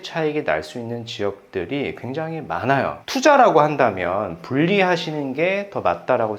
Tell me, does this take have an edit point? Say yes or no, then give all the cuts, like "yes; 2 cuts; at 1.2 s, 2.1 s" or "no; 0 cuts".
yes; 1 cut; at 3.0 s